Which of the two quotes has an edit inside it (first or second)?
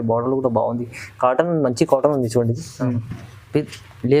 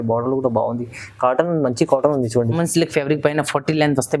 second